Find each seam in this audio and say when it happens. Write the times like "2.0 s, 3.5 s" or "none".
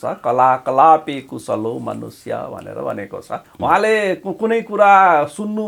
3.4 s